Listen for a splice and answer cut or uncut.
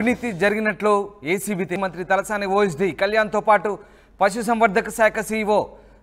cut